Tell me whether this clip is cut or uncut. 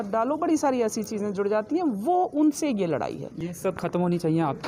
uncut